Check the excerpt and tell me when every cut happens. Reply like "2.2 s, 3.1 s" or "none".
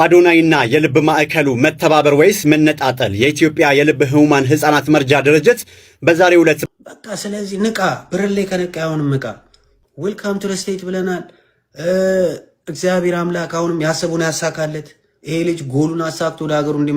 6.6 s